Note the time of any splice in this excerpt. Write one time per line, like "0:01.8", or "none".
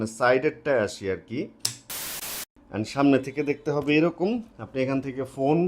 0:02.3